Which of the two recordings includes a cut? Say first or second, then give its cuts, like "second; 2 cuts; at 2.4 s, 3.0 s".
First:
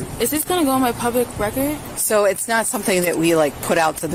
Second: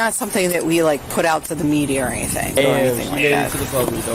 second; 1 cut; at 2.6 s